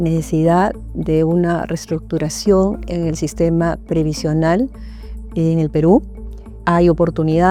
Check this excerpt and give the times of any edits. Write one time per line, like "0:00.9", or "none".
none

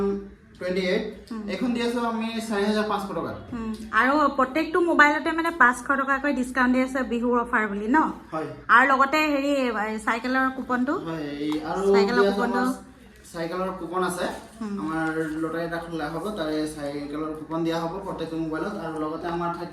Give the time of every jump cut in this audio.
none

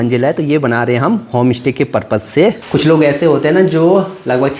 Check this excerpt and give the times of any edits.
0:02.6

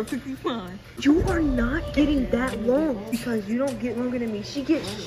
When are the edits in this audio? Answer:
0:00.9
0:03.1

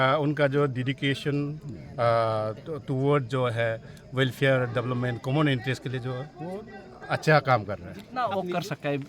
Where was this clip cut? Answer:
0:08.0

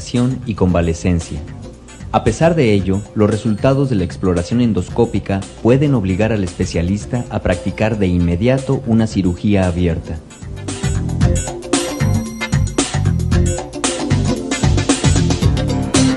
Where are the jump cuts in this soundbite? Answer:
none

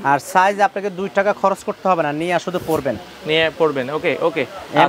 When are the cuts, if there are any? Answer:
none

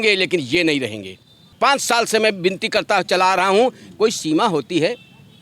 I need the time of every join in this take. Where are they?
0:01.5

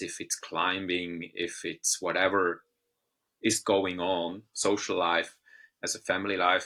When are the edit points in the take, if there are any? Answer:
none

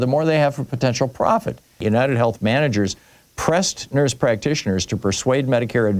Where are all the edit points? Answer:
0:01.8

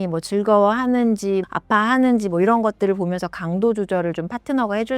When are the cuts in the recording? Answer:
0:01.5

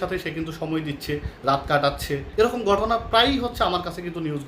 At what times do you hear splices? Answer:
0:02.3

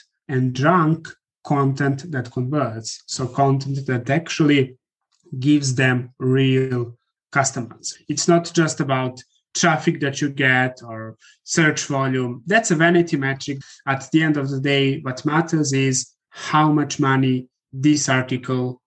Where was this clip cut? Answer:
0:13.7

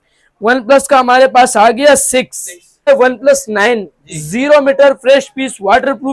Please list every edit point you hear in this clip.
0:02.9

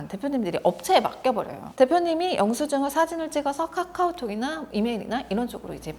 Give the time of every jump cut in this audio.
0:01.6

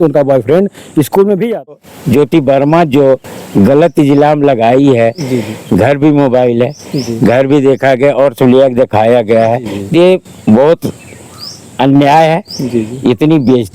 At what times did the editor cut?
0:01.8

